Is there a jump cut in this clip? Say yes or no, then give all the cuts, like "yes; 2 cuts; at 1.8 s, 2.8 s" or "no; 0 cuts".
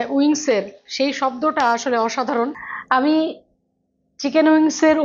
yes; 1 cut; at 2.7 s